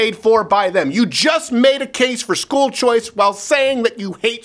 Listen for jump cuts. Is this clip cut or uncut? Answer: uncut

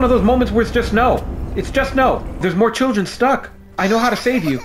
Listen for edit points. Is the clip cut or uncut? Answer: cut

